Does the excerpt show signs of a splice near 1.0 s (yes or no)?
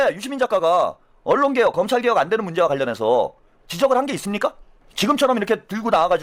no